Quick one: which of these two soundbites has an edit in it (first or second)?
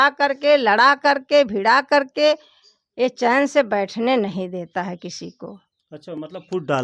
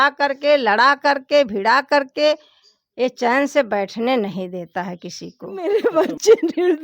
second